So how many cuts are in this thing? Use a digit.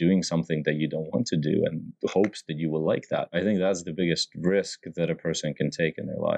1